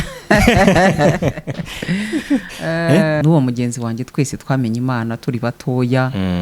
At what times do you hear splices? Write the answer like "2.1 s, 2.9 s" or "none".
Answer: 3.2 s